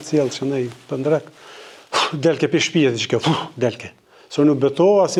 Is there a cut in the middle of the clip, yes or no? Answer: no